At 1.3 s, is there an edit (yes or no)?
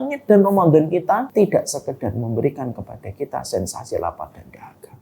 yes